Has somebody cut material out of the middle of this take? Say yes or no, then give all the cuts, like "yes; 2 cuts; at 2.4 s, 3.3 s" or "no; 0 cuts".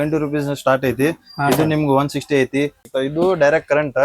yes; 1 cut; at 2.8 s